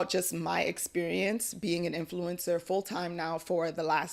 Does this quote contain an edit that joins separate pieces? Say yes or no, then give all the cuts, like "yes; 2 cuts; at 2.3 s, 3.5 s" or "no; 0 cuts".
no; 0 cuts